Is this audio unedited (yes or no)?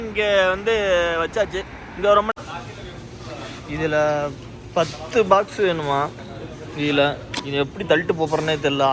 no